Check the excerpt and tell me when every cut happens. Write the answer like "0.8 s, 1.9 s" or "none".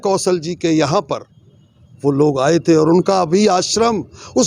none